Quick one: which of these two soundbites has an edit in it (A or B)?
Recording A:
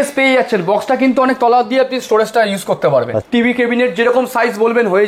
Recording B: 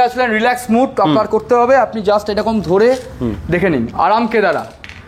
A